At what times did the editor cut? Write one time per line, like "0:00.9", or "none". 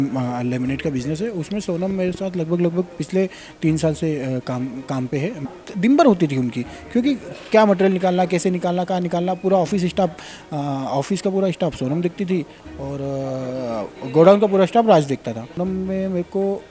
0:05.5
0:15.6